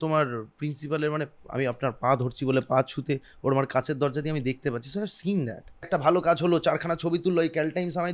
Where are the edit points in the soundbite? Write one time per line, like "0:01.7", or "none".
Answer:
0:05.9